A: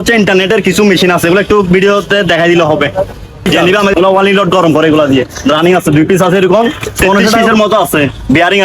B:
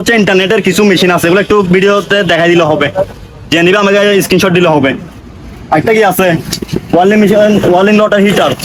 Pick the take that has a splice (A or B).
A